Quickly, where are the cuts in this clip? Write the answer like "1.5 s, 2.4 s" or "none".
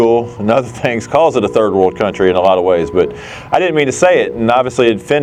none